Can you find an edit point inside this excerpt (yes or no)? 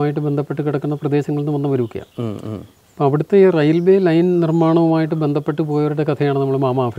no